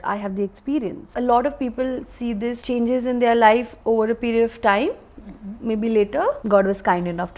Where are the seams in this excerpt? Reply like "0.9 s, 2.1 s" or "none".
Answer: 1.1 s, 2.6 s, 6.4 s